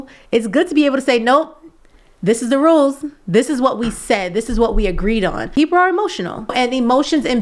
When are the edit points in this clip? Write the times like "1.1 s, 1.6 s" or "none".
5.4 s, 6.5 s